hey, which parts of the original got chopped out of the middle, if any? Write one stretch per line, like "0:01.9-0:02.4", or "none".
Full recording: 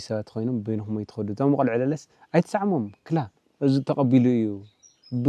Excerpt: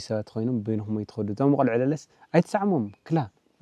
none